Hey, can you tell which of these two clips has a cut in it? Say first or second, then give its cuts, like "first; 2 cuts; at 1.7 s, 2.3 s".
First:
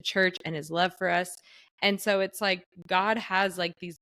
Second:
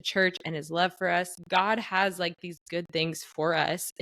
second; 1 cut; at 1.4 s